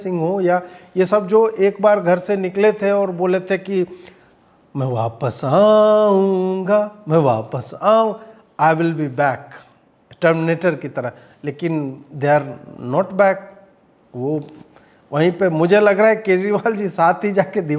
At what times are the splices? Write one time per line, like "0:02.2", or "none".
none